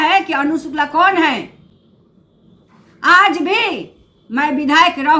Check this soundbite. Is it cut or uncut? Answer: uncut